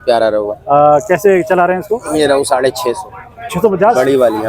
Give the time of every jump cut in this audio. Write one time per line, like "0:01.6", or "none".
none